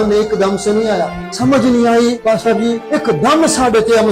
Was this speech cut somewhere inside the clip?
yes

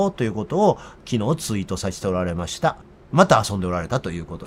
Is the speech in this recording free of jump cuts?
no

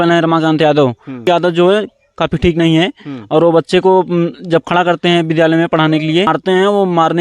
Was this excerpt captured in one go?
no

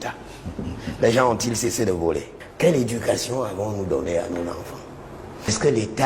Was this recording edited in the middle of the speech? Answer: yes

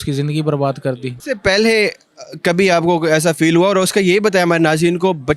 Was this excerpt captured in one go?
yes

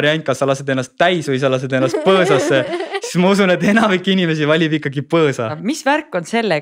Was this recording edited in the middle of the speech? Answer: yes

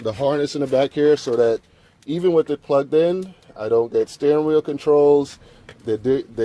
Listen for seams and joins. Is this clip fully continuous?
yes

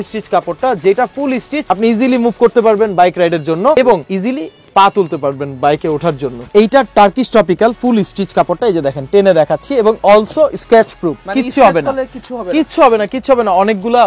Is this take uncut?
no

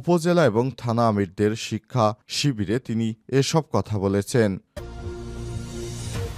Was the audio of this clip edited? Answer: yes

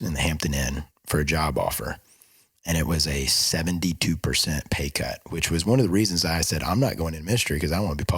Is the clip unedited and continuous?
yes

